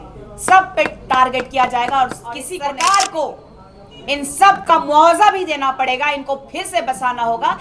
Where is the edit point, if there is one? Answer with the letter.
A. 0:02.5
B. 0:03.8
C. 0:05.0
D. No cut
A